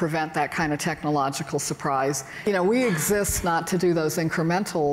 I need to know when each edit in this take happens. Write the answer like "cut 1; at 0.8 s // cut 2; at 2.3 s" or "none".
cut 1; at 2.4 s